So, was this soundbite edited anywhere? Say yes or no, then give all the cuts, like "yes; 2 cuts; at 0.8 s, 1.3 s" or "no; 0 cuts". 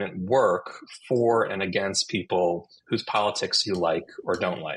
no; 0 cuts